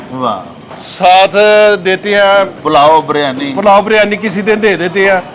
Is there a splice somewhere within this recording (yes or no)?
yes